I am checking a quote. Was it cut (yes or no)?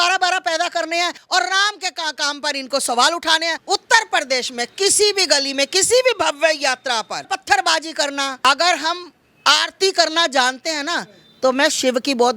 yes